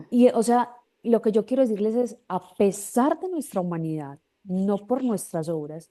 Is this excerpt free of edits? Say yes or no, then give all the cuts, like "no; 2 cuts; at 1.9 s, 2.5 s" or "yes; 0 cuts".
yes; 0 cuts